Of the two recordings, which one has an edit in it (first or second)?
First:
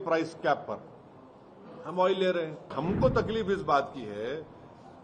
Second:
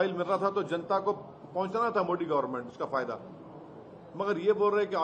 first